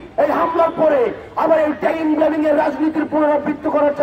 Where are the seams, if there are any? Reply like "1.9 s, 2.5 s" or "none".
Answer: none